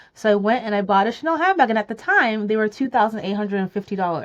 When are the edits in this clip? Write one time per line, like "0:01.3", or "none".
none